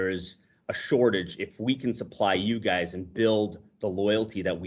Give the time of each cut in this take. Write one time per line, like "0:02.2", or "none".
none